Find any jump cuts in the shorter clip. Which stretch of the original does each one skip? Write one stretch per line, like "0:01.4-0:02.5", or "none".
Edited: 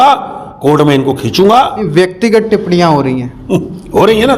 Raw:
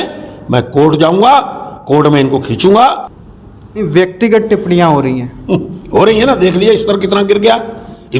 0:03.0-0:03.8